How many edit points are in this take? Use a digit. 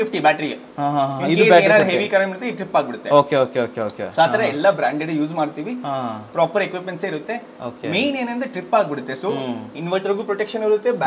0